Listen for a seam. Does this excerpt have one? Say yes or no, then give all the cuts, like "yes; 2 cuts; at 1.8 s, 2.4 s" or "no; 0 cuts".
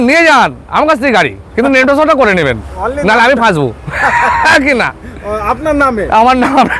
no; 0 cuts